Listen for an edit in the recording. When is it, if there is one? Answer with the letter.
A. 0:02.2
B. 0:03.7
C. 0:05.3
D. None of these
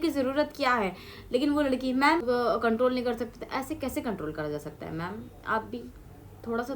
A